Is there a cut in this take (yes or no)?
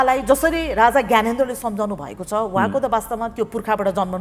no